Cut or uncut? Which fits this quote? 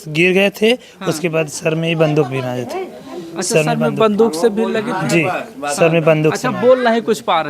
uncut